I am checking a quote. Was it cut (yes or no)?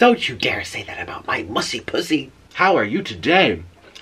yes